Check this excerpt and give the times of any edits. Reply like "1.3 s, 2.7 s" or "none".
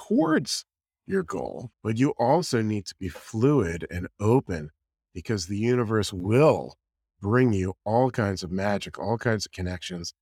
1.6 s